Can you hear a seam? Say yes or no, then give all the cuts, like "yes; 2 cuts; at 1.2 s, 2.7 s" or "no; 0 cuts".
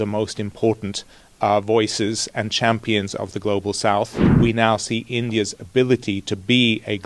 yes; 1 cut; at 4.2 s